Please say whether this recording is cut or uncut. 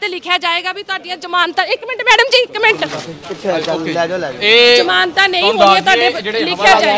uncut